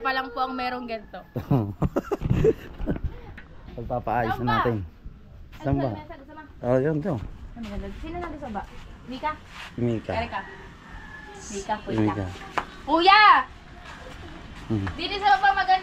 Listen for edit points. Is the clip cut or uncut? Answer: uncut